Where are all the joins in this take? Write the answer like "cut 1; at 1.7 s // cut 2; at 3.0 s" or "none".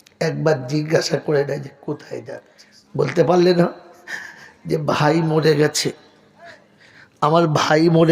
cut 1; at 2.2 s